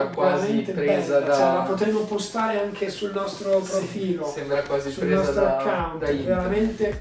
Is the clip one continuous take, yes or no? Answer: yes